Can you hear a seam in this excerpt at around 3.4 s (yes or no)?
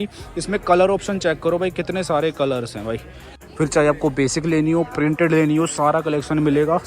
yes